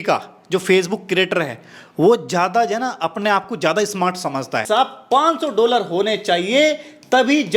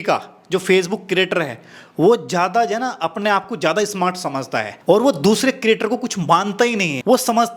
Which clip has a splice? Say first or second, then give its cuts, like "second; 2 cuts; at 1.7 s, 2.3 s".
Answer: first; 1 cut; at 4.6 s